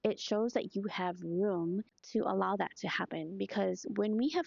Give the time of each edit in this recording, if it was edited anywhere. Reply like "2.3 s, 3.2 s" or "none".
2.0 s